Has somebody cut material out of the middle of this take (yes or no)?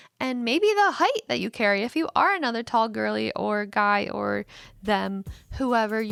no